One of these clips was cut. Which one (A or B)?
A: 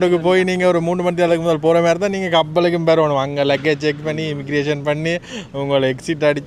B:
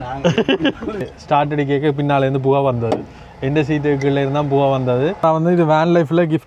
B